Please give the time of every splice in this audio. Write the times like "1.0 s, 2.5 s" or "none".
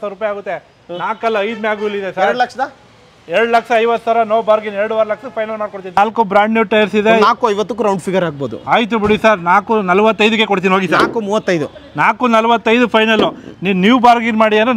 6.0 s